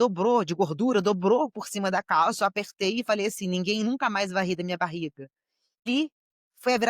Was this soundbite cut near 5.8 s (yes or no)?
yes